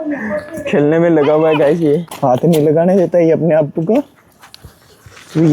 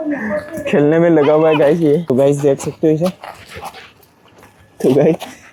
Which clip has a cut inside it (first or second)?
first